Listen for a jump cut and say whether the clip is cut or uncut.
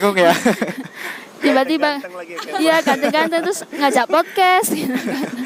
uncut